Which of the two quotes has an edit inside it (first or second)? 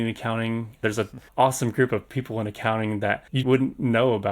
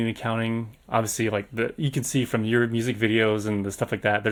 first